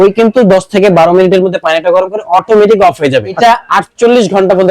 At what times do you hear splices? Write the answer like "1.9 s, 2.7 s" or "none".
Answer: 3.4 s